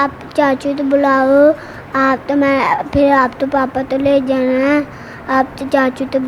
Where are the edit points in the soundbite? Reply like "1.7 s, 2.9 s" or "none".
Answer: none